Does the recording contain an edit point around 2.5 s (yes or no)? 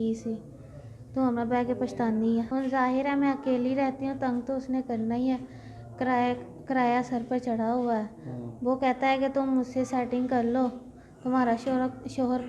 yes